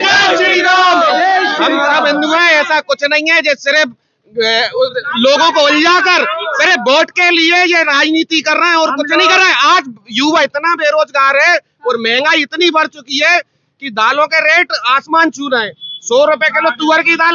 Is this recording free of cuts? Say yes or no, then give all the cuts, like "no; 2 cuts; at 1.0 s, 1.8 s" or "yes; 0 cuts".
yes; 0 cuts